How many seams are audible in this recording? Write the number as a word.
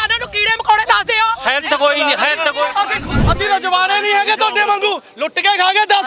one